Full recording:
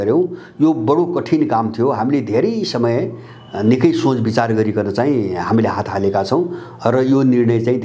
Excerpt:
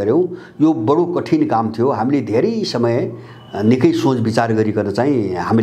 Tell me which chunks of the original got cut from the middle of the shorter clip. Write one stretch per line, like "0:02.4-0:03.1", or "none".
none